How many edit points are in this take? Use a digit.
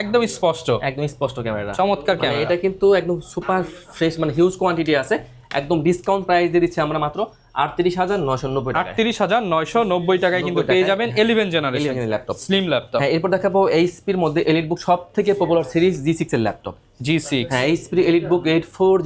0